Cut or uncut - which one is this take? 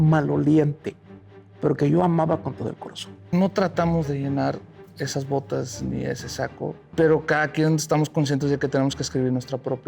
cut